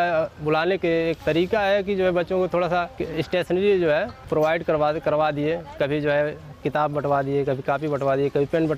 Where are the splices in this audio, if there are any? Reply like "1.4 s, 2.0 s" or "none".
1.2 s, 3.0 s, 4.2 s

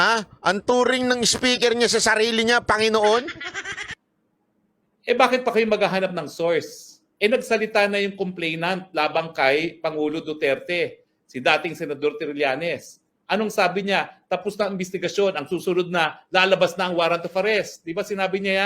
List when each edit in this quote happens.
4.0 s

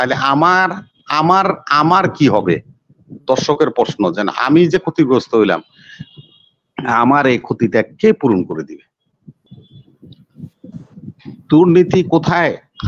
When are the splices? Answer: 9.4 s

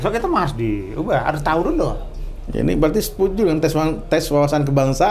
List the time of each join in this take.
none

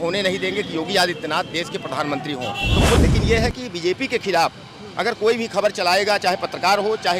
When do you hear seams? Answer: 3.0 s

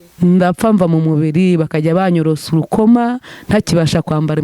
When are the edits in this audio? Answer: none

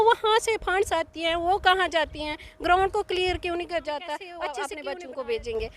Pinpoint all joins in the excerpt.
4.4 s

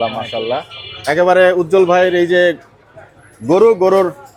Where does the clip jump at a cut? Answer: none

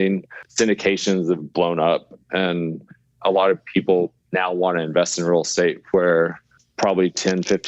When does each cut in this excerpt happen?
none

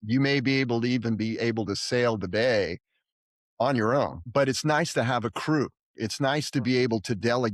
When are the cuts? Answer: 4.2 s

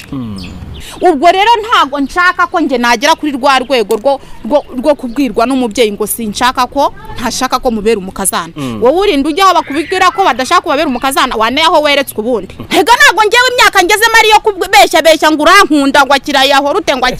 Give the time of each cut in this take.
0.9 s, 12.6 s

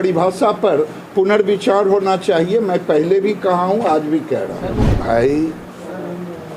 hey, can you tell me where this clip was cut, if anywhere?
5.0 s

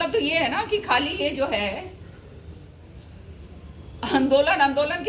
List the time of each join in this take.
none

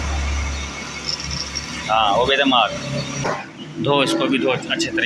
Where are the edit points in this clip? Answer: 3.2 s

